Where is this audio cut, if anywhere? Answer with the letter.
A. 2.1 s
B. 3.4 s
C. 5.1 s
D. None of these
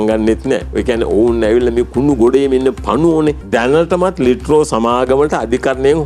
B